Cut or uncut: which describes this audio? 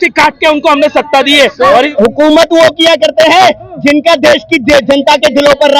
cut